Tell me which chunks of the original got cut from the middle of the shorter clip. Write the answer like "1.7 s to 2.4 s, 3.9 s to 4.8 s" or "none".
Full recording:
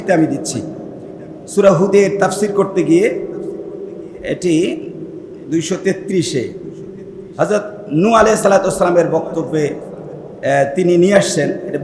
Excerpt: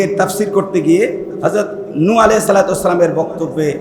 3.3 s to 7.2 s

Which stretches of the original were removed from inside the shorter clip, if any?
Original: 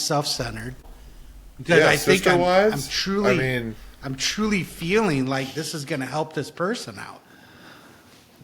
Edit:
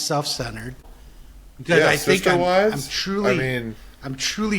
none

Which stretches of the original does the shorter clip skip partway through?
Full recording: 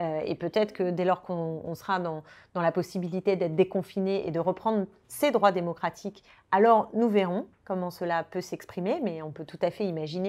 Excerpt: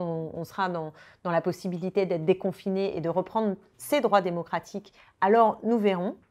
none

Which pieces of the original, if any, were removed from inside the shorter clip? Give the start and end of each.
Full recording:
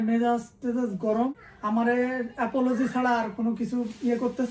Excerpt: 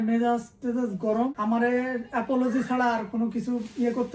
1.4 s to 1.6 s

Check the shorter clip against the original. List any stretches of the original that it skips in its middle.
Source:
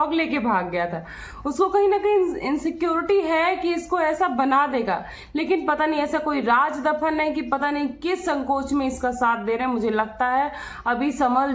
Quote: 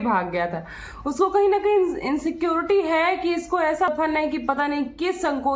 4.3 s to 6.9 s

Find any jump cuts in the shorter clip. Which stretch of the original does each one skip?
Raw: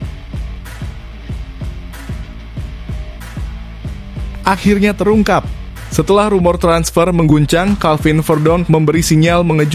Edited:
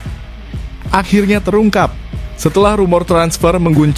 1.7 s to 4.4 s

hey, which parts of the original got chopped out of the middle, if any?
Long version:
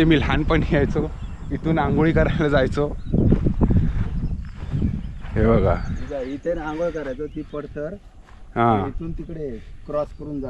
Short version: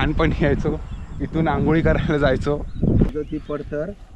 3.4 s to 7.2 s

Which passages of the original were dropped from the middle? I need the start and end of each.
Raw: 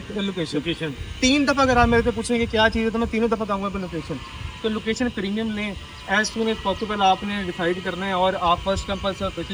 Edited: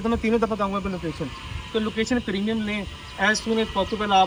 none

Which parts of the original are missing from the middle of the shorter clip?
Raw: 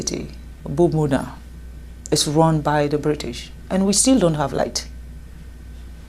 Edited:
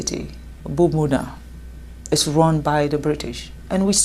none

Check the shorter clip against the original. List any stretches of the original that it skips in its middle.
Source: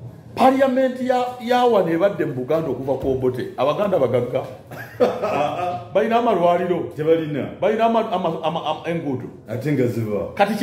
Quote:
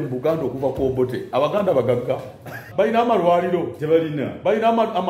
4.9 s to 5.8 s

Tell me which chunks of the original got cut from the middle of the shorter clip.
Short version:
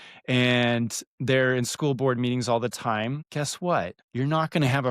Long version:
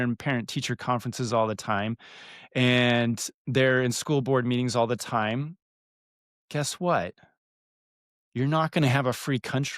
5.5 s to 6.4 s, 7.2 s to 8.2 s

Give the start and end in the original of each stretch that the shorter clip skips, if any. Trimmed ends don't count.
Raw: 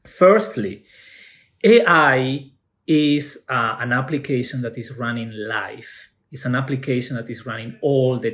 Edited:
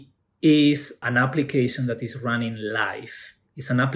3.4 s to 3.7 s

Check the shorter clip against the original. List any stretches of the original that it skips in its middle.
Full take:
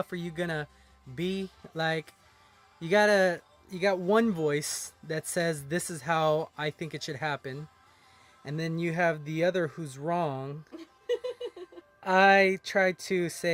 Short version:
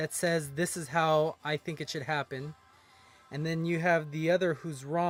none

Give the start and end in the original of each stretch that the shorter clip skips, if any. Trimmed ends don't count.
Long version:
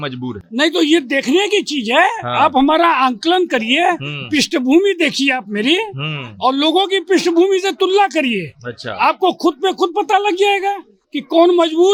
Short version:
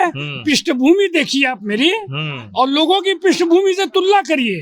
none

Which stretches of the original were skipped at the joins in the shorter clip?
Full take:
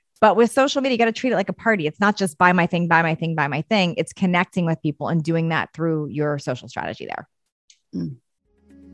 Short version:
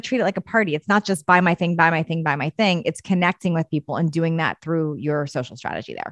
none

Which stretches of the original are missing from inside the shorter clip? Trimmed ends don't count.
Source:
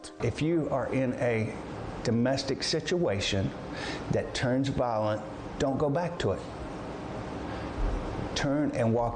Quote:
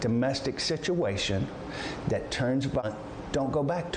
4.9 s to 5.1 s

